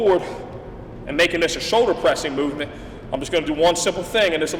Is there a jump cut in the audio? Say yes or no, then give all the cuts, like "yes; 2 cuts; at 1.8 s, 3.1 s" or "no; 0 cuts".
no; 0 cuts